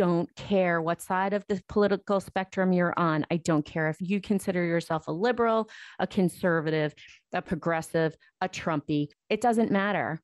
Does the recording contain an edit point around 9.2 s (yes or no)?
yes